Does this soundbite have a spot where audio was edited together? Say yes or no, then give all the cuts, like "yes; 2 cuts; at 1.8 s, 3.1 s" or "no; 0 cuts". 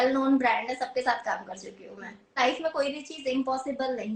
yes; 1 cut; at 2.4 s